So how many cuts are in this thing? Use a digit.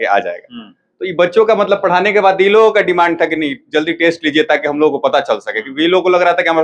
0